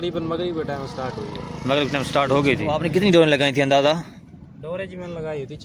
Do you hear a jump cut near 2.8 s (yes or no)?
yes